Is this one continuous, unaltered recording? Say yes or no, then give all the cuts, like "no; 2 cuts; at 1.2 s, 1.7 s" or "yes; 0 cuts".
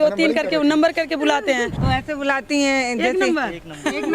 no; 1 cut; at 1.8 s